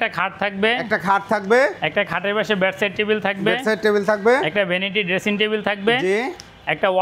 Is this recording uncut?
yes; 0 cuts

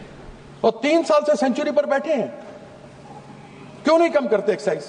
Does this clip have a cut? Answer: no; 0 cuts

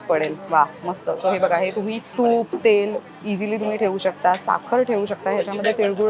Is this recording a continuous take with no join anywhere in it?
no; 1 cut; at 2.1 s

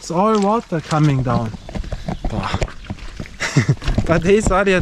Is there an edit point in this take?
no; 0 cuts

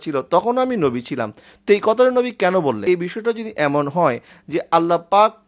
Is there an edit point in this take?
yes; 1 cut; at 2.8 s

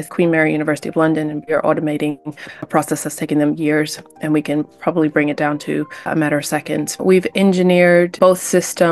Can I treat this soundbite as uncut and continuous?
no; 3 cuts; at 1.4 s, 6.9 s, 8.1 s

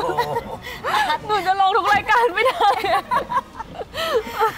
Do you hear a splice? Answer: no; 0 cuts

